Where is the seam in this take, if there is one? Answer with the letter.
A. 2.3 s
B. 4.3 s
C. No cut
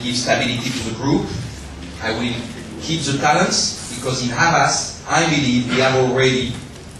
B